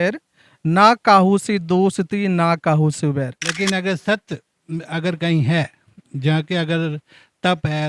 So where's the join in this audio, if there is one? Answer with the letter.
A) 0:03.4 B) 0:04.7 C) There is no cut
A